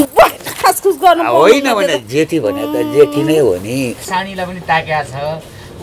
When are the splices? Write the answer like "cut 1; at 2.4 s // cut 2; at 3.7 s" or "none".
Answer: cut 1; at 4.0 s

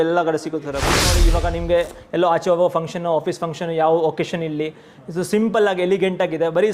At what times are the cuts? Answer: cut 1; at 1.1 s

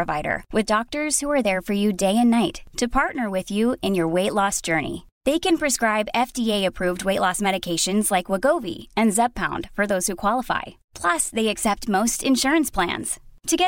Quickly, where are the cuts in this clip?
none

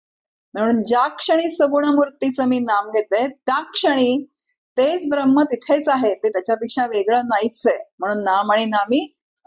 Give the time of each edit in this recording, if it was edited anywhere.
none

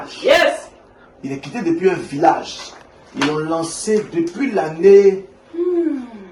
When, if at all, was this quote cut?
none

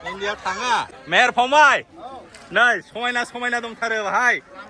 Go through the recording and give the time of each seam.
cut 1; at 1.0 s

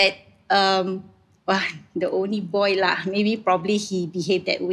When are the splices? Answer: none

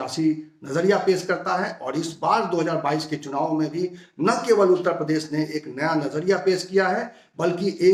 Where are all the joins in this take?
none

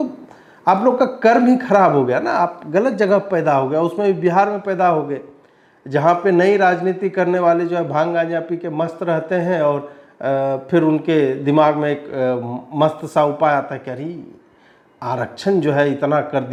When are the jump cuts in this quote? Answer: none

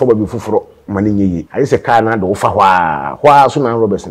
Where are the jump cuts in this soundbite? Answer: cut 1; at 1.4 s

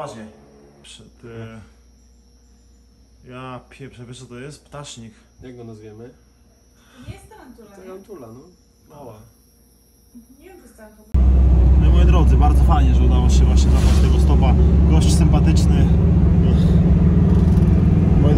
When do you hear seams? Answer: cut 1; at 0.9 s // cut 2; at 11.1 s

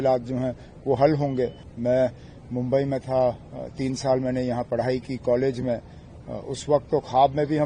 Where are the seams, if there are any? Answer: cut 1; at 1.7 s

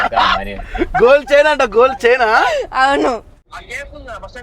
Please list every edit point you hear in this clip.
cut 1; at 3.4 s

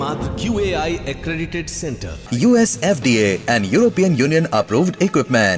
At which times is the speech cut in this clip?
none

